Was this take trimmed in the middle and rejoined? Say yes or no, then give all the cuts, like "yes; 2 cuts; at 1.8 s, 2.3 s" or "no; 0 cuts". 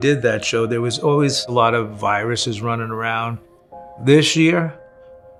no; 0 cuts